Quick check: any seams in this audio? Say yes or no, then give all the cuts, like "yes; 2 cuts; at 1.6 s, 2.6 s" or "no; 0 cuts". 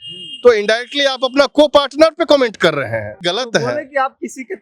yes; 1 cut; at 3.3 s